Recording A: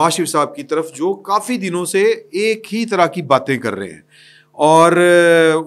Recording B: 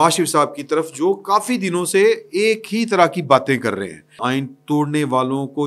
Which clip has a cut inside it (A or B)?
B